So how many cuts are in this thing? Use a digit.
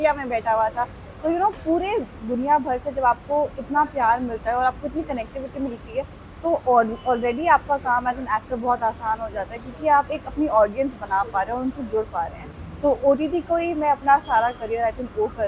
0